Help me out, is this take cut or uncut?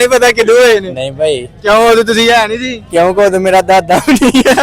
uncut